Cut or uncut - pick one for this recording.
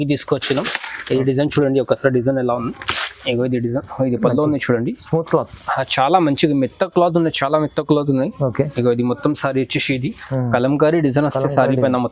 uncut